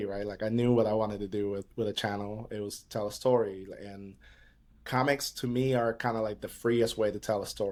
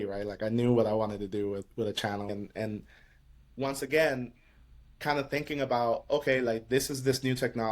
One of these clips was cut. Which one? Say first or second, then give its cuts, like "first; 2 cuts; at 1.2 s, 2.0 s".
second; 1 cut; at 2.3 s